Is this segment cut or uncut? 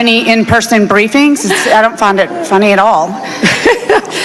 cut